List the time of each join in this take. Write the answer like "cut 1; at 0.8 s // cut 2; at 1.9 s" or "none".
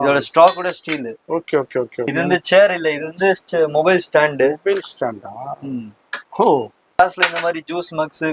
cut 1; at 2.1 s // cut 2; at 7.0 s